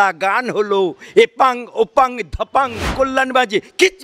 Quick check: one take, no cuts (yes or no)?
no